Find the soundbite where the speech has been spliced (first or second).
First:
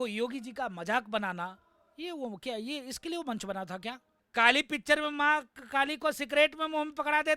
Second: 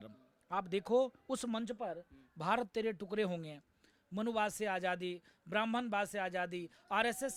first